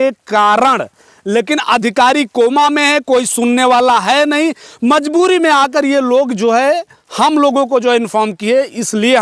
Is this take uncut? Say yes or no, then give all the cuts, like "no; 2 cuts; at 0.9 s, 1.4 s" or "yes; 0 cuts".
yes; 0 cuts